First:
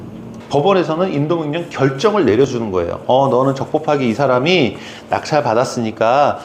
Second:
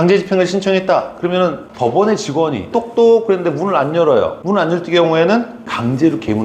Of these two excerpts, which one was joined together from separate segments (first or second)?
second